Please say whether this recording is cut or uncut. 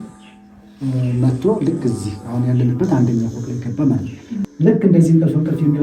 cut